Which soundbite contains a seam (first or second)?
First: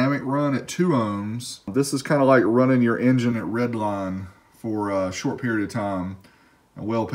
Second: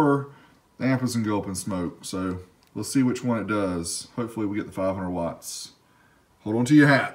first